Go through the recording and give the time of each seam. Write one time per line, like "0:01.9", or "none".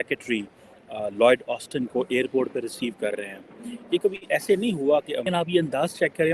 0:05.2

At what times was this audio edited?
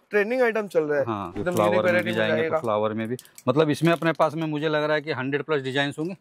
0:01.3

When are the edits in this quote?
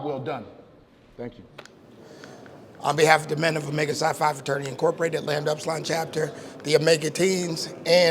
0:02.0

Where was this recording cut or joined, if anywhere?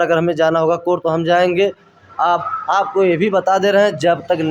none

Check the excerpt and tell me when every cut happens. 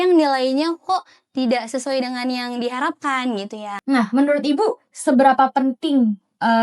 0:03.7

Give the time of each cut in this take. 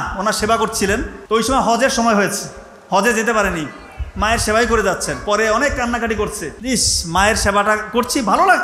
0:01.1
0:06.5

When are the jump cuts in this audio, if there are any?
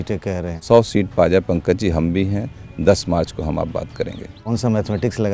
0:04.4

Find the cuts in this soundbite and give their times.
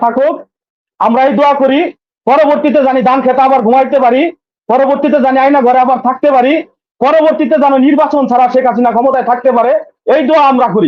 none

